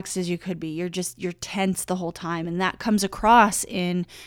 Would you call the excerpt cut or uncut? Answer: uncut